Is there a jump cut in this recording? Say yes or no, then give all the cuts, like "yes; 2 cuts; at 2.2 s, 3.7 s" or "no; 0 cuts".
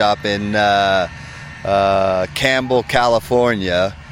no; 0 cuts